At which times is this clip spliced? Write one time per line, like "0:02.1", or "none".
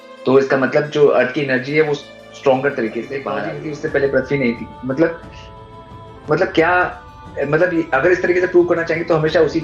0:03.4